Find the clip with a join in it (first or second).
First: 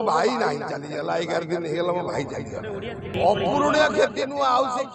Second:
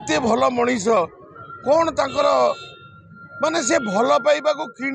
first